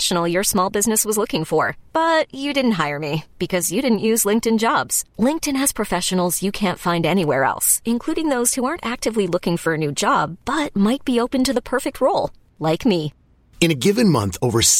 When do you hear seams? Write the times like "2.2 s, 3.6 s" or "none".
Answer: none